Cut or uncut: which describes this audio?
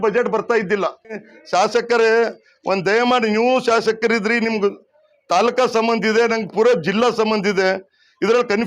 cut